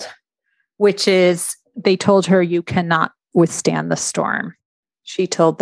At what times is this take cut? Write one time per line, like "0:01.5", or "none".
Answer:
0:04.7

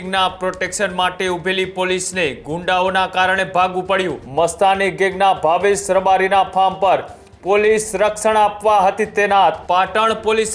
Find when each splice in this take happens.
0:04.2
0:09.6

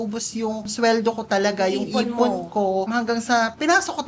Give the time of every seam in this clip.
none

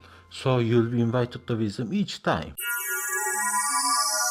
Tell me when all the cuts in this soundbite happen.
0:02.5

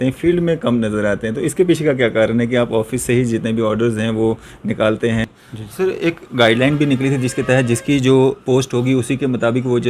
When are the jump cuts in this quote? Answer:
0:05.2

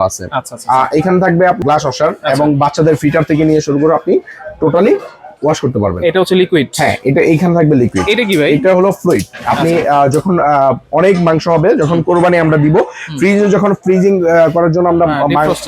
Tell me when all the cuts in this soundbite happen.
0:01.6

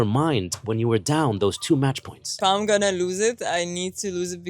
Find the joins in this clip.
0:02.2

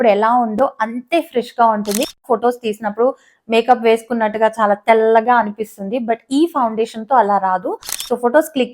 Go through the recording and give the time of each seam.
0:02.2

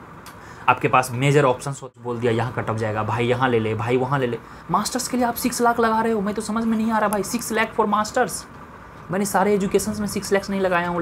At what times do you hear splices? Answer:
0:01.9

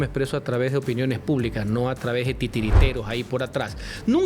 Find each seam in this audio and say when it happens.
none

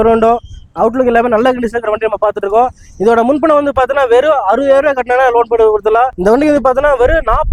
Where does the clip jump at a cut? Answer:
0:06.1

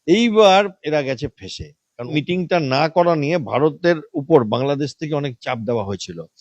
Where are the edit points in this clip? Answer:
0:02.1

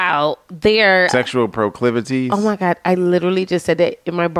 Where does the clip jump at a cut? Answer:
0:01.1

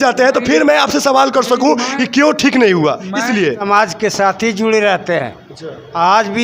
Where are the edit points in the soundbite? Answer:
0:03.6

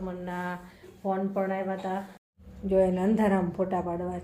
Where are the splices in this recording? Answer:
0:02.4

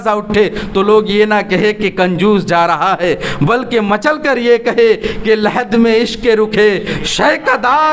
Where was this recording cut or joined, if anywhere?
none

